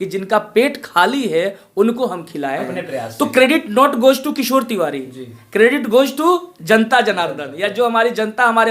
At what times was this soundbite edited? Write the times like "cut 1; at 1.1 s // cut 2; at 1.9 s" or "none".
cut 1; at 2.7 s